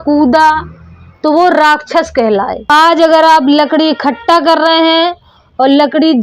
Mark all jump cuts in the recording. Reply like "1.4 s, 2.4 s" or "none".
2.6 s